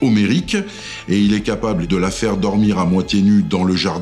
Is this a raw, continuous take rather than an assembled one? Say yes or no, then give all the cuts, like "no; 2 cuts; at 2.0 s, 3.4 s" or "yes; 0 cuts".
no; 1 cut; at 1.8 s